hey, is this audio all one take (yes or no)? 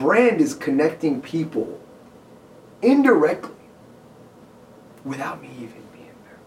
yes